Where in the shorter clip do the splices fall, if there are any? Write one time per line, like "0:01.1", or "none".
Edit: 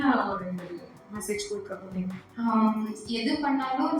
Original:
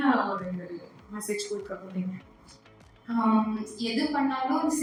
0:02.2